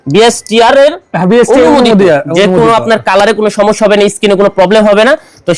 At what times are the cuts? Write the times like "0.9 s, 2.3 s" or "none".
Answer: none